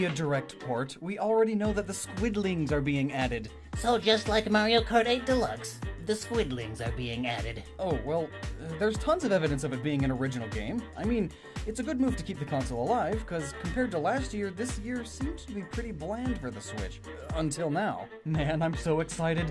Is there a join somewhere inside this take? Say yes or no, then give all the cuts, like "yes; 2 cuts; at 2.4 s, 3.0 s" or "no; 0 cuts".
no; 0 cuts